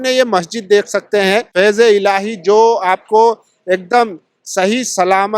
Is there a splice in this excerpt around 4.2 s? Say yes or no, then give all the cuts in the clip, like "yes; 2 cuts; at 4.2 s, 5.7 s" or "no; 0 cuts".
no; 1 cut; at 1.5 s